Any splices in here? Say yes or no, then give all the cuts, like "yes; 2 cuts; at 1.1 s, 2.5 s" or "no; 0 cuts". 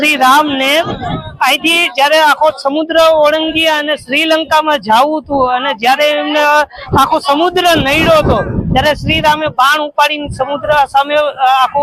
no; 0 cuts